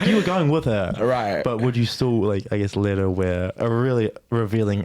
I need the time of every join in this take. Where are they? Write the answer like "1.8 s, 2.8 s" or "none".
3.5 s